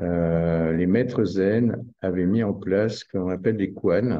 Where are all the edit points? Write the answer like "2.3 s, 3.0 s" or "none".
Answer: none